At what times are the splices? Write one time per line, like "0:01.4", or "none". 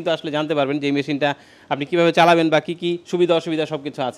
none